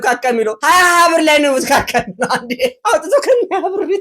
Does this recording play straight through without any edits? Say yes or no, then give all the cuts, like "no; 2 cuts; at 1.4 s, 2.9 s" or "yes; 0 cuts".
no; 1 cut; at 2.8 s